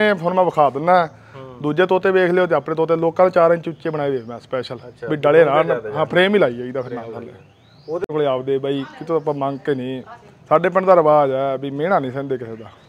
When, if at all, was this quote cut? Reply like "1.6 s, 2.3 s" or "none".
8.0 s

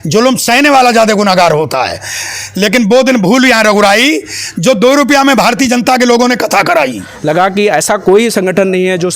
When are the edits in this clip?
7.1 s

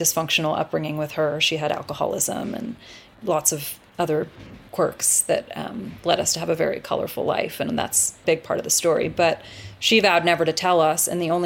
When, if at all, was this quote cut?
3.0 s, 4.7 s, 8.2 s

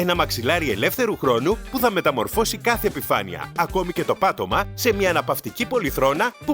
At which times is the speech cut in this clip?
3.4 s

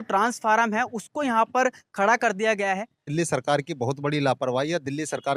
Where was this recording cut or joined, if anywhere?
3.1 s

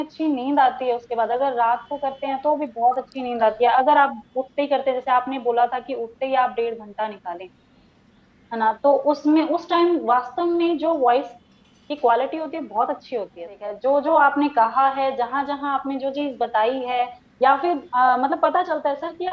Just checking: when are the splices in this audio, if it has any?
13.7 s

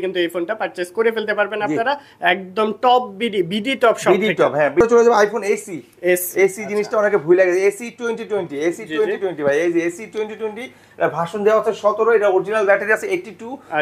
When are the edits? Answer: 4.8 s

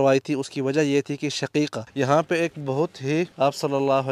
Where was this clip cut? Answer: 1.8 s, 3.3 s

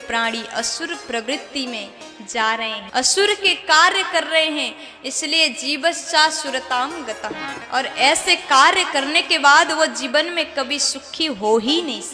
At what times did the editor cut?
2.8 s, 7.5 s

